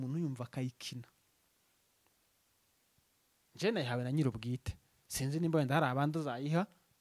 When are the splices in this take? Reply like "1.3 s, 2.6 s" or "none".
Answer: none